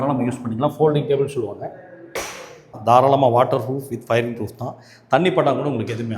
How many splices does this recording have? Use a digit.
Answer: 1